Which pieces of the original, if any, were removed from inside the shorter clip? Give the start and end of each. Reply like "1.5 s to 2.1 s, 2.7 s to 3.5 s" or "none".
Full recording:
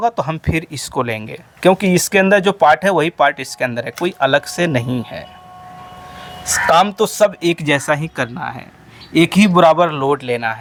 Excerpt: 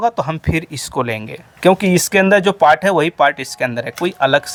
none